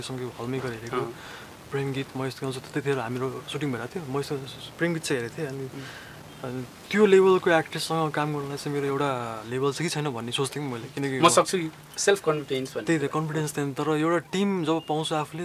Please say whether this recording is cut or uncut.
uncut